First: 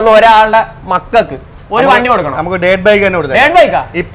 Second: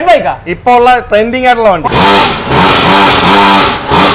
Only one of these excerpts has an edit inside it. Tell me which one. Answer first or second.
second